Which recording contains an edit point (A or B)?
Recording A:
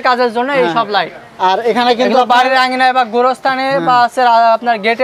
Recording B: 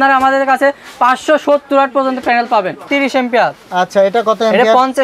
B